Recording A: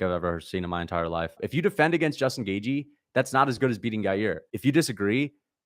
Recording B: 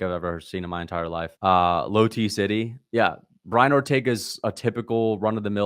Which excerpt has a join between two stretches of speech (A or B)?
A